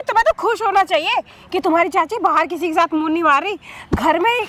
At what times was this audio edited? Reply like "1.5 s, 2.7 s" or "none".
none